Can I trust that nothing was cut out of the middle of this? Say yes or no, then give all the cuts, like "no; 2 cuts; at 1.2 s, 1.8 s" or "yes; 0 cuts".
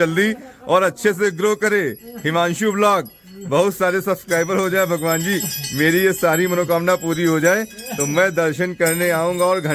yes; 0 cuts